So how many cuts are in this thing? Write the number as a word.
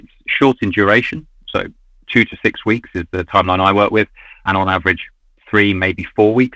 one